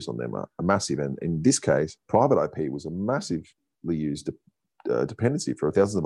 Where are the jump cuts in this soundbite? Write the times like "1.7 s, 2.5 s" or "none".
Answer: 2.0 s